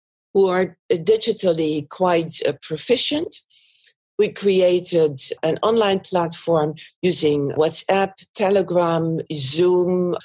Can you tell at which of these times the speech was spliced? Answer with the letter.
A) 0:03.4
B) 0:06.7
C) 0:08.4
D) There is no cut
D